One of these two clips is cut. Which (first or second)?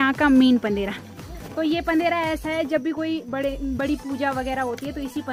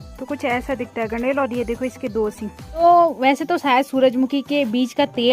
second